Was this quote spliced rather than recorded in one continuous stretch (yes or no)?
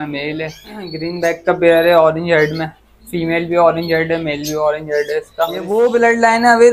yes